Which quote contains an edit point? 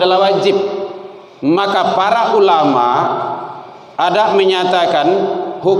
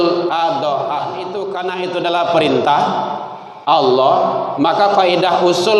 second; 1 cut; at 1.3 s

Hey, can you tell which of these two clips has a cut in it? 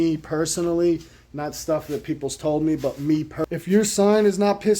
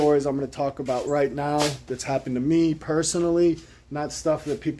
first; 1 cut; at 3.4 s

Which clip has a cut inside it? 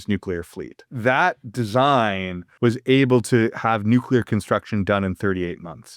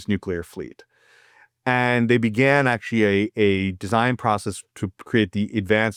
first; 2 cuts; at 0.9 s, 2.4 s

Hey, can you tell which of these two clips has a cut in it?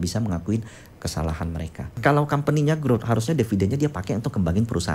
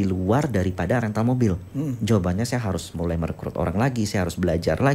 first; 1 cut; at 2.0 s

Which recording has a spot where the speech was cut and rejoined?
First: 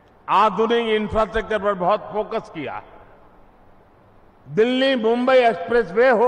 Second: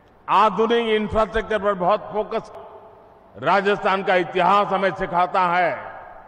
second; 1 cut; at 2.6 s

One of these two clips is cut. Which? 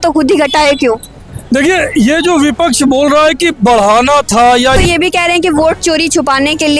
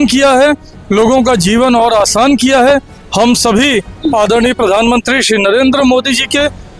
first; 1 cut; at 4.8 s

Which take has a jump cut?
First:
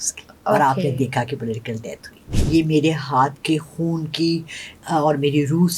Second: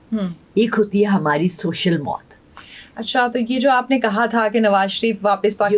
first; 1 cut; at 2.3 s

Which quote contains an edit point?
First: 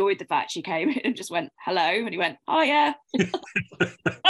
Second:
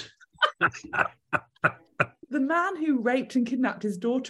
second; 1 cut; at 2.2 s

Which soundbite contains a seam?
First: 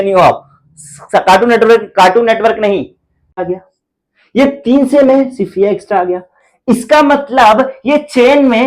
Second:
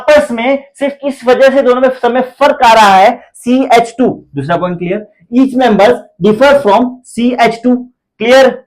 first; 1 cut; at 3.4 s

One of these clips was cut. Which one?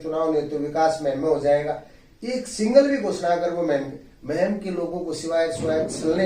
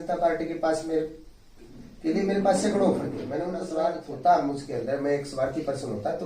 second; 1 cut; at 3.6 s

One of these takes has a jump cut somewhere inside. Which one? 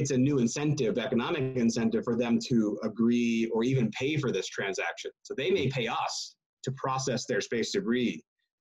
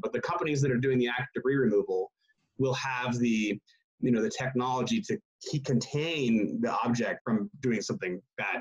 second; 1 cut; at 7.2 s

